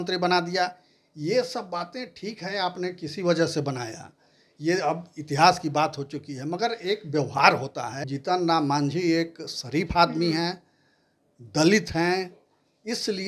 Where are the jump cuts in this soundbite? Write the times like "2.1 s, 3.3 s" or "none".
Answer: 8.0 s